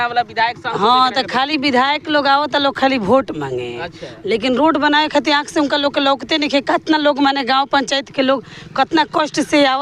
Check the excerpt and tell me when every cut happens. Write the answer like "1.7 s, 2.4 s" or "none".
none